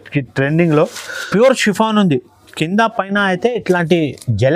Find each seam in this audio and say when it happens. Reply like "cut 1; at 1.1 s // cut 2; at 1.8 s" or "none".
cut 1; at 1.2 s